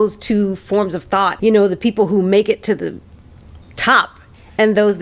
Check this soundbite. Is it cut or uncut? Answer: cut